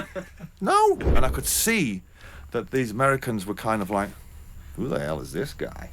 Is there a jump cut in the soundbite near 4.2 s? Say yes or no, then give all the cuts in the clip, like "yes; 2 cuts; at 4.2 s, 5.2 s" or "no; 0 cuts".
no; 1 cut; at 1.1 s